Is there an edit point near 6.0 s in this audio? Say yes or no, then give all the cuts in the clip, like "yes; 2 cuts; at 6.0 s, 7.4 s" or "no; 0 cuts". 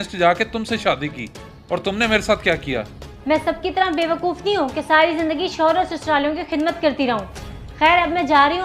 yes; 1 cut; at 6.0 s